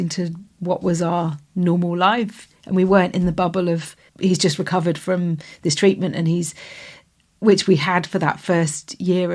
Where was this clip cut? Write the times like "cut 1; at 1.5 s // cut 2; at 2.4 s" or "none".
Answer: cut 1; at 4.1 s

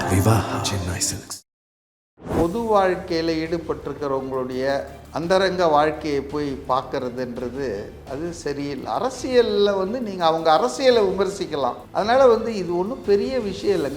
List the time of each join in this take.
cut 1; at 2.3 s // cut 2; at 11.8 s

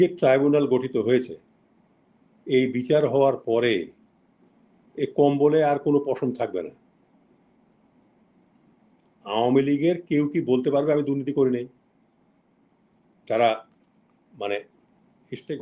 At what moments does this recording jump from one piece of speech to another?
none

